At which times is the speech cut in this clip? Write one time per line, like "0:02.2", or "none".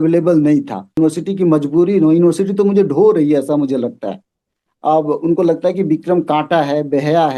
0:01.0